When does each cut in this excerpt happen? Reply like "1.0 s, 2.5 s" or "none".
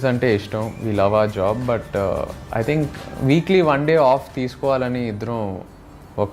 none